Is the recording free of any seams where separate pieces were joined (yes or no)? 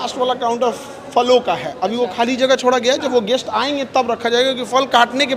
yes